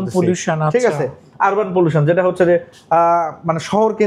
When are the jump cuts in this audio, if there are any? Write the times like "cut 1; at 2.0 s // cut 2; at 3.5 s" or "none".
none